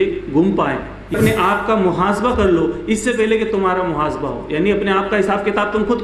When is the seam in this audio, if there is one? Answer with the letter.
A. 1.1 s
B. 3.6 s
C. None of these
A